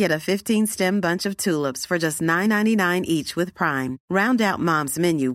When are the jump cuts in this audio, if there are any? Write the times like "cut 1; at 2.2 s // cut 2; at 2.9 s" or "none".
none